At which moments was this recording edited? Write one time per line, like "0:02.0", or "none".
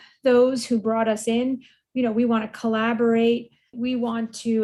none